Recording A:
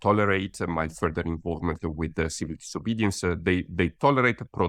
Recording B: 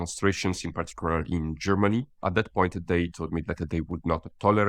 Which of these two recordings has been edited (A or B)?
B